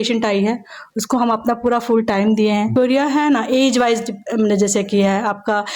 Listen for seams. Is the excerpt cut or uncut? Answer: cut